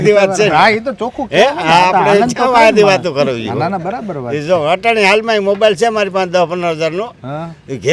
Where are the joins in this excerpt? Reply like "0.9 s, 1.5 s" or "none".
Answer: none